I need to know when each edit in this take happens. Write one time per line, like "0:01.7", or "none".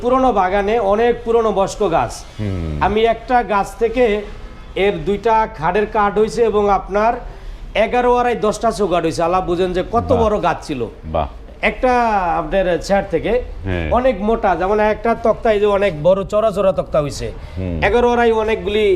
none

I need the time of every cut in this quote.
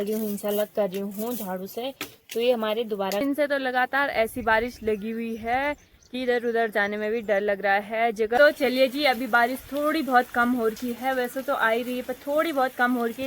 0:03.2
0:08.4

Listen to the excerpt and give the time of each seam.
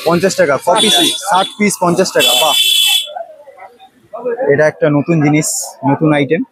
none

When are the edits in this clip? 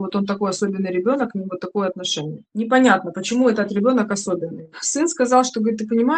none

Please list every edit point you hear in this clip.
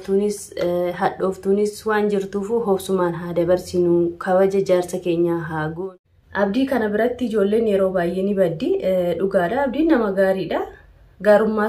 0:05.8

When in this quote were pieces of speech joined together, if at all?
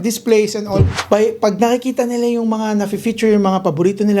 0:01.0

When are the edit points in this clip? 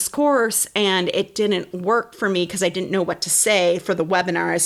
none

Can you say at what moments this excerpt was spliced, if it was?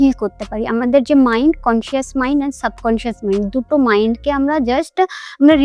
none

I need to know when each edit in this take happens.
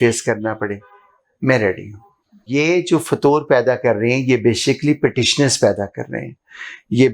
0:02.4

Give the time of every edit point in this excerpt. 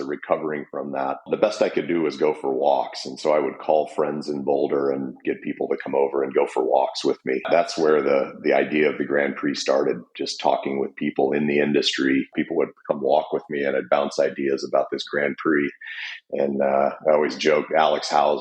0:01.3
0:07.4
0:12.3

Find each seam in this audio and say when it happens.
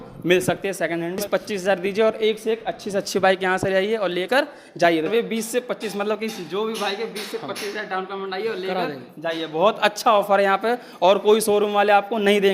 0:01.2
0:05.1

